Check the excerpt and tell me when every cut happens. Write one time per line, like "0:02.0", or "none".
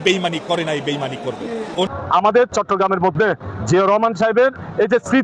0:01.9